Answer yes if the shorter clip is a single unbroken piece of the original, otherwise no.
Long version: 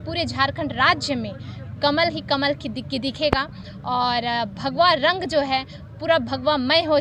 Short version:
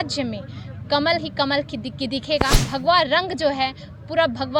no